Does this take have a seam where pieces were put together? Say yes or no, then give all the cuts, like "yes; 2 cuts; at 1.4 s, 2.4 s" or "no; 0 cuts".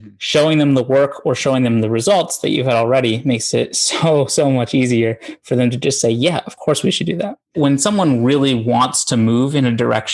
yes; 1 cut; at 7.5 s